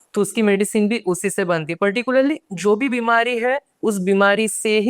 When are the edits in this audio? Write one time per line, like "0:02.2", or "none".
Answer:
none